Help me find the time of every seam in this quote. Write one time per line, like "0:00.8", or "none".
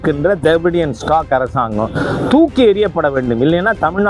none